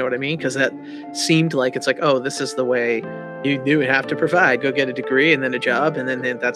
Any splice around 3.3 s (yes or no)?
yes